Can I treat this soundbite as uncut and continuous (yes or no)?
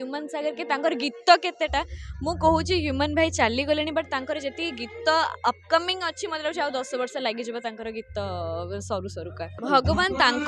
no